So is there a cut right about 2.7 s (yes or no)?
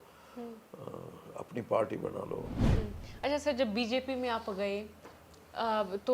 yes